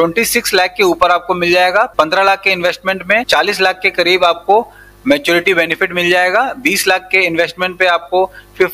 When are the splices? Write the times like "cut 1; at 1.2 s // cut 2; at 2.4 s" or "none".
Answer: none